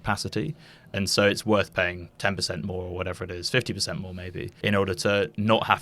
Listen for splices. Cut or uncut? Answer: cut